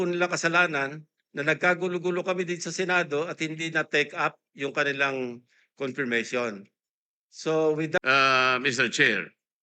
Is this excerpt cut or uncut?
cut